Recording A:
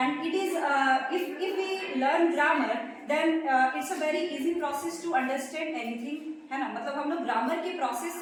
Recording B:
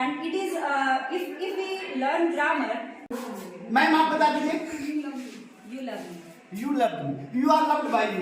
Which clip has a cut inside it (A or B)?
B